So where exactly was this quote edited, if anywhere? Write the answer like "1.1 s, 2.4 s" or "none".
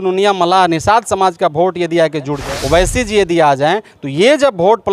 2.4 s